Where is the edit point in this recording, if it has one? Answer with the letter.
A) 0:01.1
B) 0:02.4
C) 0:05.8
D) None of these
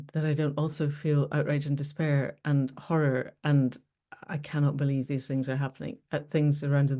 D